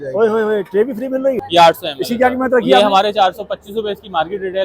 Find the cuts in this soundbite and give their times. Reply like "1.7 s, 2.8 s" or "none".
1.4 s